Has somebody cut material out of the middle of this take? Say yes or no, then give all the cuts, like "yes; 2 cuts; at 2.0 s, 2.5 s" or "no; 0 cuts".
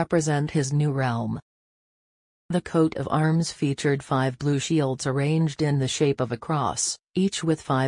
no; 0 cuts